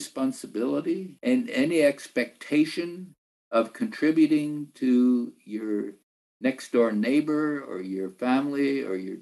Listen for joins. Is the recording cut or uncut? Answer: cut